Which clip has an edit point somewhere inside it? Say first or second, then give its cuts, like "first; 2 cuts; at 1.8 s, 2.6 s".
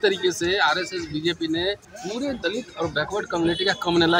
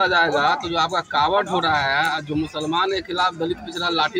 first; 1 cut; at 1.9 s